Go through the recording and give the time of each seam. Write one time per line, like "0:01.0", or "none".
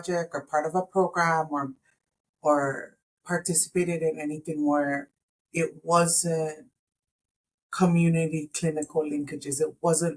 none